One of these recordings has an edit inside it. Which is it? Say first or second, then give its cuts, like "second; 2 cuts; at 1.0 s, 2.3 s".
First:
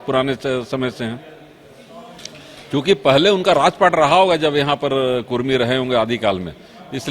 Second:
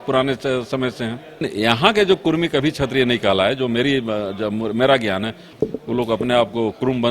second; 2 cuts; at 1.4 s, 5.4 s